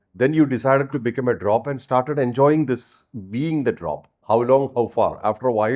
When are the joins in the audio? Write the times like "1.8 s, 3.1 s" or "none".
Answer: 4.1 s